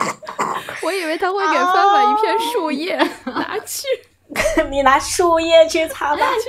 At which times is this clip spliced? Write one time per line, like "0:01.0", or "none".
none